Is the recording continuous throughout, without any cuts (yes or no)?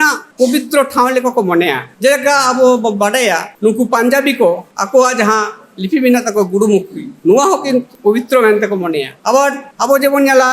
yes